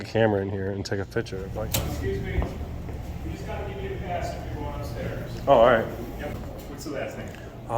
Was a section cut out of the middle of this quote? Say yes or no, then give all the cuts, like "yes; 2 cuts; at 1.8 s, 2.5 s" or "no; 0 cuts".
yes; 2 cuts; at 1.4 s, 6.3 s